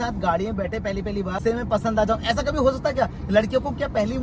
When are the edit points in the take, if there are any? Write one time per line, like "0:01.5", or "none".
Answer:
0:01.4